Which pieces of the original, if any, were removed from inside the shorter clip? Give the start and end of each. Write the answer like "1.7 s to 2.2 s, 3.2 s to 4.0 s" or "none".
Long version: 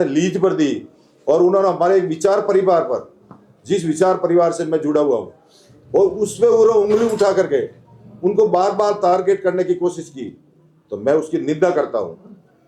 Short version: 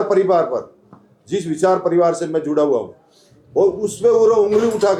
none